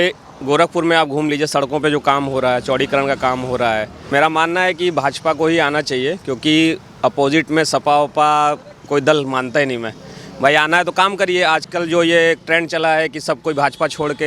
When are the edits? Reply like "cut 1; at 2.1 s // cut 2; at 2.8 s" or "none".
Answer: cut 1; at 4.0 s

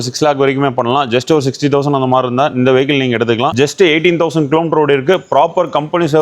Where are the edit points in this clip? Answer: cut 1; at 3.5 s

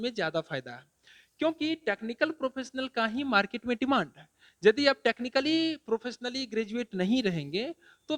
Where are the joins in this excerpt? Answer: none

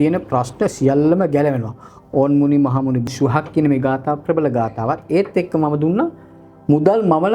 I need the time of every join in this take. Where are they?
cut 1; at 3.1 s

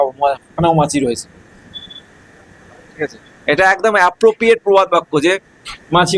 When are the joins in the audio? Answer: none

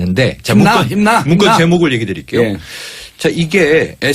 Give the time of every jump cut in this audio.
cut 1; at 2.5 s

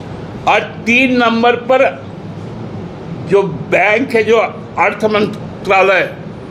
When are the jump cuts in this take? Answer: none

